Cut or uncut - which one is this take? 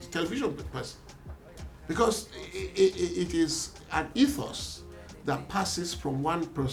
uncut